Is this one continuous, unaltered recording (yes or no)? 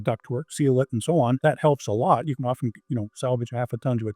no